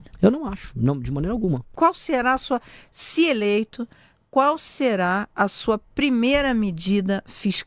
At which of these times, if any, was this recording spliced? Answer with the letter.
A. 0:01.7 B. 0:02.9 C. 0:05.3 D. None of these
A